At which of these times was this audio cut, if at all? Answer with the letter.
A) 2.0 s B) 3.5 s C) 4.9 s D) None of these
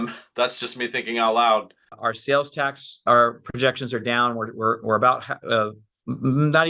A